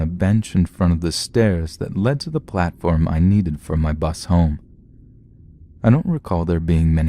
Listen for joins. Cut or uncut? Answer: cut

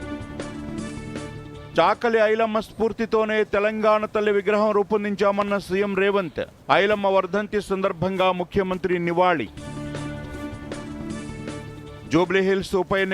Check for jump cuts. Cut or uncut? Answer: cut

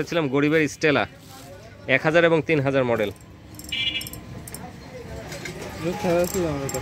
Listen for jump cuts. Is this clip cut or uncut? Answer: uncut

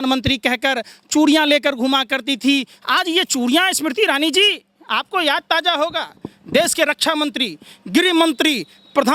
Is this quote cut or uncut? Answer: uncut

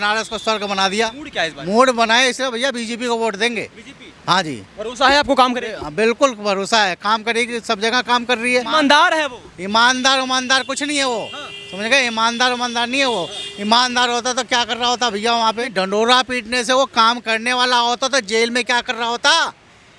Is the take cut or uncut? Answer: cut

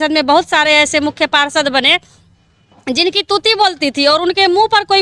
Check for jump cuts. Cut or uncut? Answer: uncut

